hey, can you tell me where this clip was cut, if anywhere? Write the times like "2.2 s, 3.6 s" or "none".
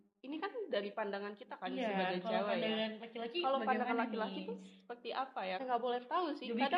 5.6 s